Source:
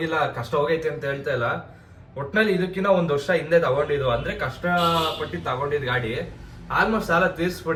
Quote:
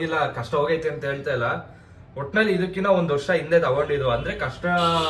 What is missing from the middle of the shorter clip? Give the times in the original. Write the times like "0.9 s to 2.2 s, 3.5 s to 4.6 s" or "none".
none